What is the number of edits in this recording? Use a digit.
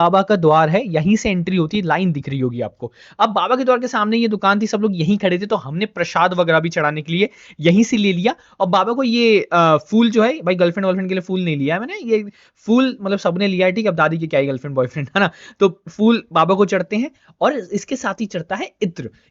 0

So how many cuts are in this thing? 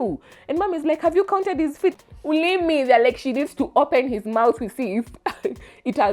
1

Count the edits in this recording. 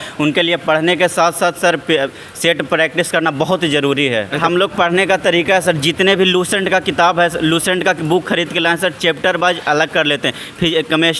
1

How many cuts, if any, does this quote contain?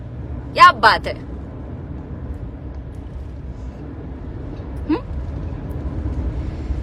0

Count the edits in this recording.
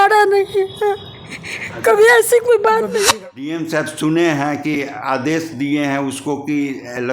1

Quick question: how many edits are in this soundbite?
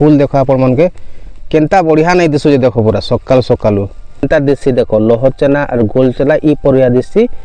1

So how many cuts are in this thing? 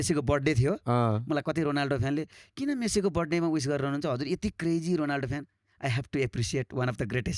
0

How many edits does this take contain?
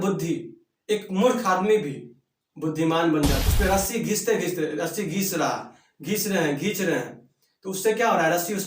1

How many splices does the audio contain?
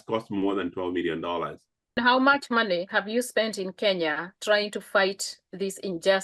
1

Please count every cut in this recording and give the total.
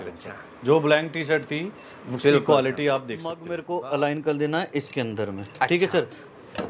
1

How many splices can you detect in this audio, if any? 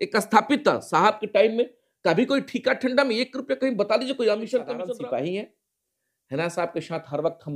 1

